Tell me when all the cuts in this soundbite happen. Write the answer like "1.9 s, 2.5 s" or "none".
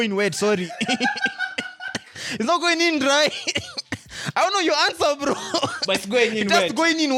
none